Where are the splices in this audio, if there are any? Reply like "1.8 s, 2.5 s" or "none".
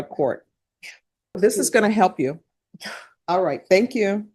1.4 s